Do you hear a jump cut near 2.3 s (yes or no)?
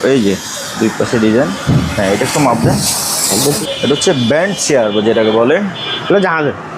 no